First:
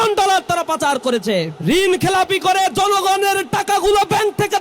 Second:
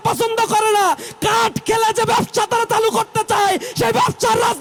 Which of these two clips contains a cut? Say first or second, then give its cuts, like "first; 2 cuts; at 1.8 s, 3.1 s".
first; 1 cut; at 1.5 s